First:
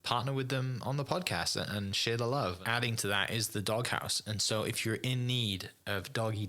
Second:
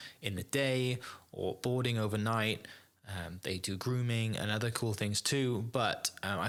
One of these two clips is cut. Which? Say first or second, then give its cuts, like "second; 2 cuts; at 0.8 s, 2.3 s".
first; 1 cut; at 2.6 s